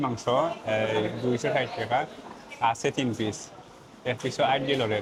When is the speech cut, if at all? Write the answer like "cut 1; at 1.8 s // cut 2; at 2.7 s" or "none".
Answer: none